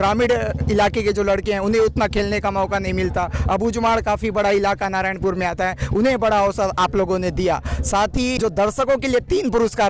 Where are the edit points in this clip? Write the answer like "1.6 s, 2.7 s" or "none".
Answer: 8.4 s